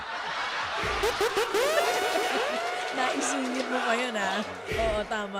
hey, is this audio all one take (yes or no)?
yes